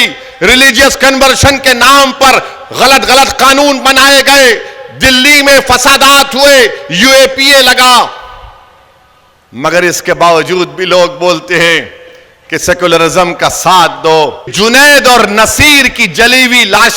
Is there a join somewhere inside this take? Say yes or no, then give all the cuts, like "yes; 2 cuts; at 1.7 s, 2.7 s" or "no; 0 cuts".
yes; 1 cut; at 14.5 s